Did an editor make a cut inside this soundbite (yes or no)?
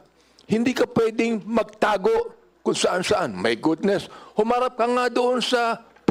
no